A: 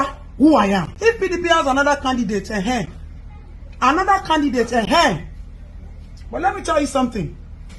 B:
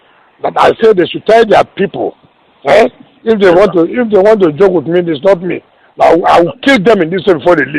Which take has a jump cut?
A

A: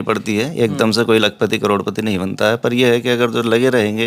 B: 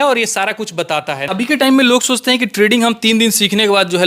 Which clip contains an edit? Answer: B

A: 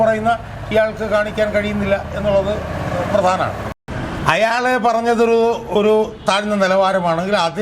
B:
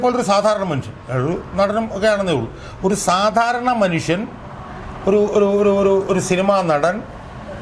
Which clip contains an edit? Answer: A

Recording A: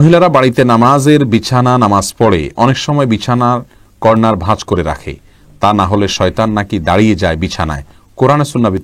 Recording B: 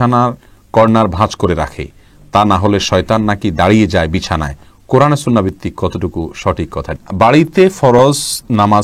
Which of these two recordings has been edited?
B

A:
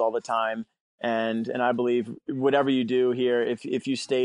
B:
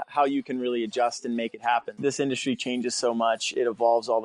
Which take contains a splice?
B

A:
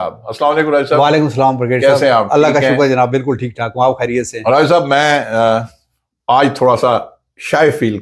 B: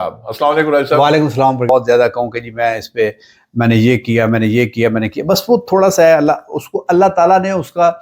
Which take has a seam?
B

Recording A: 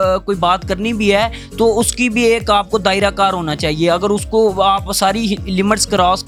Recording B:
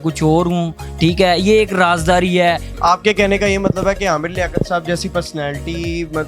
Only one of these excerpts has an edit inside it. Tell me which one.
B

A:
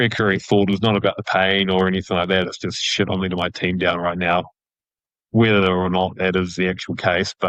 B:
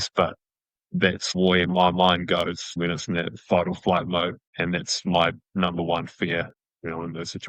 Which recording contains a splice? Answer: B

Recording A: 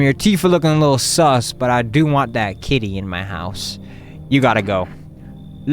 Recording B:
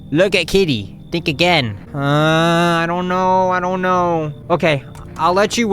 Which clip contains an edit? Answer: B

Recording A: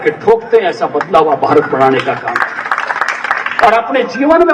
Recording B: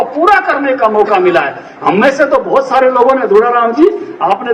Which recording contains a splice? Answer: A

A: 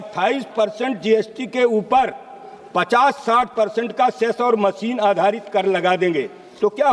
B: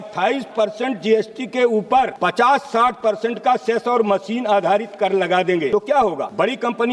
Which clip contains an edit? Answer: B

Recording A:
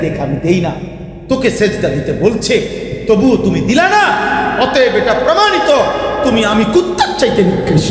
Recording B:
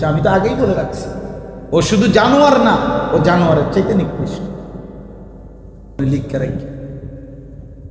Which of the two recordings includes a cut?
B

